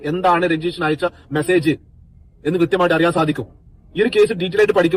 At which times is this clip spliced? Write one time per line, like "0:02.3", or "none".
none